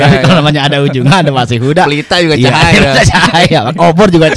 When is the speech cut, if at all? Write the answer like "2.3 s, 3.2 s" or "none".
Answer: none